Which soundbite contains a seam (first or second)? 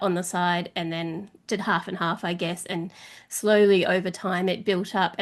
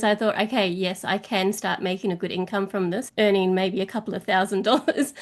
second